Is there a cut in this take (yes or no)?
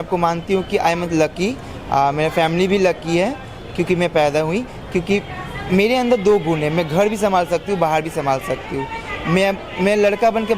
no